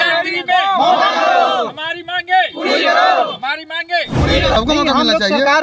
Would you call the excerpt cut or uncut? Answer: cut